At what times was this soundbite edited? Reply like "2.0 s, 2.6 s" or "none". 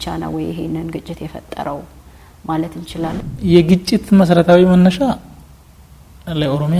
3.2 s